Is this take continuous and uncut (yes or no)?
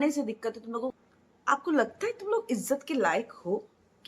no